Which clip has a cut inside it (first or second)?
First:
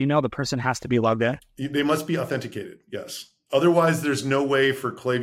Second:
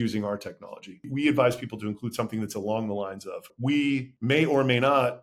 second